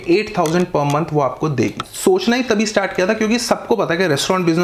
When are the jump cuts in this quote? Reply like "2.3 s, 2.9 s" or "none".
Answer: 1.9 s